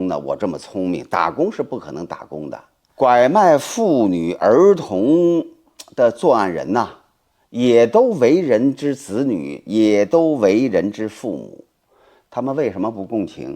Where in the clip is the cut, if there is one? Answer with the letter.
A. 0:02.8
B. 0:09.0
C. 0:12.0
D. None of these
A